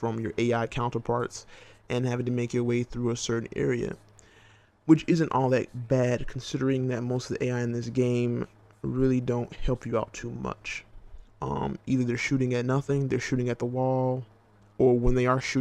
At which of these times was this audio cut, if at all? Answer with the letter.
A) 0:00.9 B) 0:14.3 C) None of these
B